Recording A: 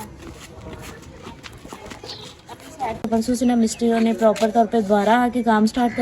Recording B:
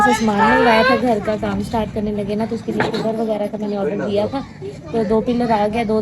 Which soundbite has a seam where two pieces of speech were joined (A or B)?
A